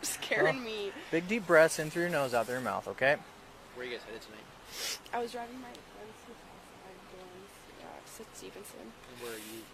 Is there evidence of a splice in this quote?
no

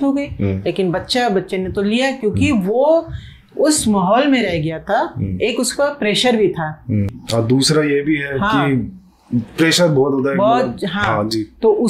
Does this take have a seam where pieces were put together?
no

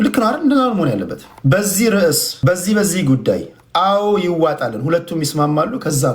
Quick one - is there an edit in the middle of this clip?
yes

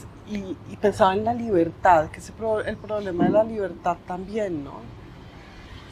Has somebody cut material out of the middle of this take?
no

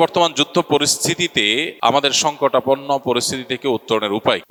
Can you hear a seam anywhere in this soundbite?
no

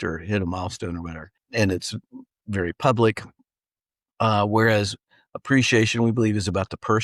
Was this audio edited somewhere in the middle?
yes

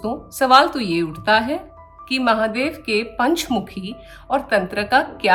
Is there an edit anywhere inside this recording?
no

